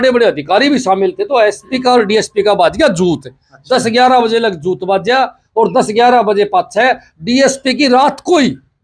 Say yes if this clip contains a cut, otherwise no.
no